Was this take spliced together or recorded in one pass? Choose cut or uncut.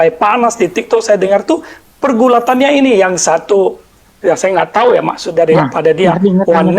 uncut